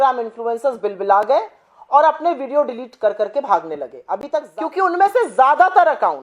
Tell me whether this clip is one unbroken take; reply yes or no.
no